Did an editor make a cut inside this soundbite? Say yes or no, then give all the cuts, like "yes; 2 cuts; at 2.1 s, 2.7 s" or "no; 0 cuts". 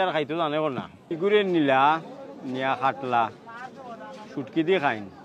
yes; 1 cut; at 1.0 s